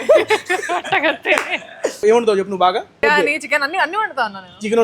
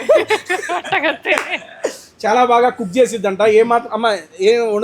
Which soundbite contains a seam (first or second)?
first